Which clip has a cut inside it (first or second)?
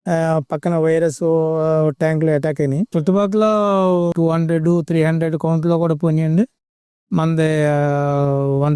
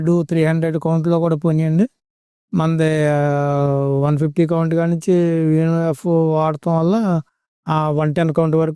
first